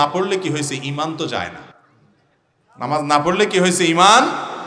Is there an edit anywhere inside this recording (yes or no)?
no